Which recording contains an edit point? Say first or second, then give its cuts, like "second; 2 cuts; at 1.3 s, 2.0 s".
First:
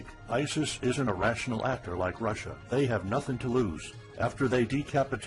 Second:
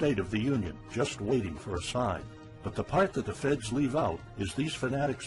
first; 1 cut; at 1.0 s